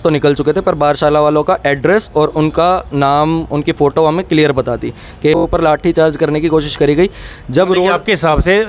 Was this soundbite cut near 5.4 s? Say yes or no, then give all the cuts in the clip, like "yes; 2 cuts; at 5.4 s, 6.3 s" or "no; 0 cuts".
yes; 1 cut; at 5.4 s